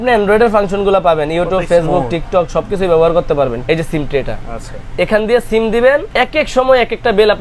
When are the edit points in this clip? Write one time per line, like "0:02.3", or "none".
0:03.6
0:06.1